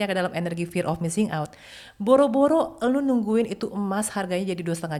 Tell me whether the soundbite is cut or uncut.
uncut